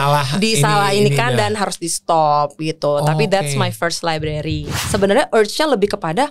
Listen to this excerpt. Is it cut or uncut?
cut